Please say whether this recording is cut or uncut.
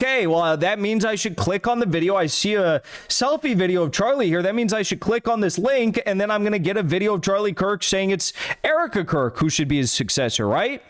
cut